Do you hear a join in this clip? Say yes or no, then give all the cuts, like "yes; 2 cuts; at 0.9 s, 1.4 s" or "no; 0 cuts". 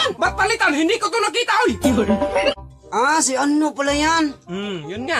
yes; 1 cut; at 2.6 s